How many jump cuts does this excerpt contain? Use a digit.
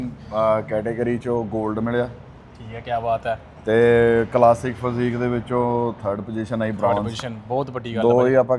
0